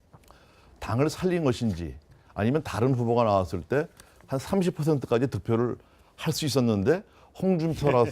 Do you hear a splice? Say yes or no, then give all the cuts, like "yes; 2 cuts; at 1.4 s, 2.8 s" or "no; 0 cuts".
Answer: yes; 1 cut; at 6.7 s